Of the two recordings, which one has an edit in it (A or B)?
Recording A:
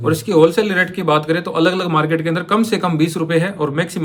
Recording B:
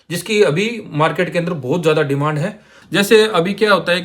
B